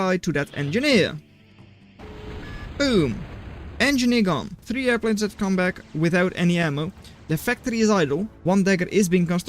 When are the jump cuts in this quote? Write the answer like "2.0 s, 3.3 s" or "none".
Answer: 4.6 s, 8.3 s